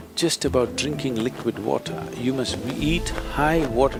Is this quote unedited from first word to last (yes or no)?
yes